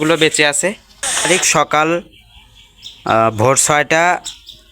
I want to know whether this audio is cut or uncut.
cut